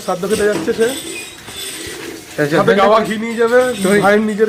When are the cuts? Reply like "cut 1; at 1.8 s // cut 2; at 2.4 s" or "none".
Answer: none